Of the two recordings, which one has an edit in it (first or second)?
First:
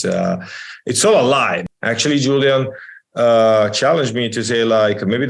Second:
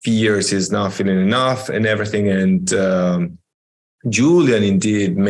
first